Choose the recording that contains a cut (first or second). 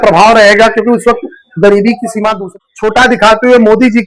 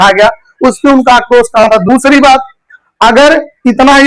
first